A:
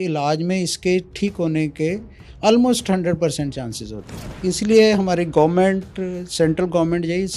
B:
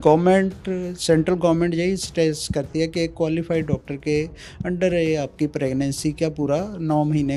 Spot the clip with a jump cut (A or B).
A